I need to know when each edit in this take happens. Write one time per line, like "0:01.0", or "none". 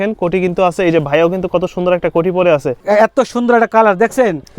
0:02.8